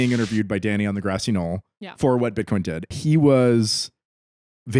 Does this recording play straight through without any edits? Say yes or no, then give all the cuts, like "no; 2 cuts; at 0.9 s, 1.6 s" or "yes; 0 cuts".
no; 1 cut; at 2.9 s